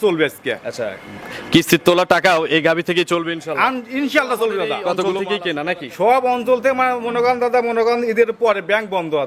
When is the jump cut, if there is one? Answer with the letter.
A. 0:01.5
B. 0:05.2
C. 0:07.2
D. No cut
B